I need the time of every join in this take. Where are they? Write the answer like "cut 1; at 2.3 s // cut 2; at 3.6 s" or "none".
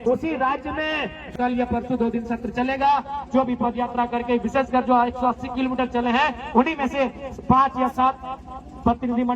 cut 1; at 1.3 s